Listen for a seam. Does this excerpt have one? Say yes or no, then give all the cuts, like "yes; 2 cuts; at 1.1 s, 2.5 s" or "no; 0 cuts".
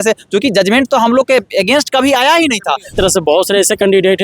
yes; 1 cut; at 2.9 s